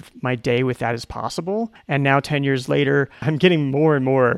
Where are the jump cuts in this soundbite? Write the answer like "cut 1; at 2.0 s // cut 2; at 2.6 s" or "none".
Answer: cut 1; at 1.8 s // cut 2; at 3.3 s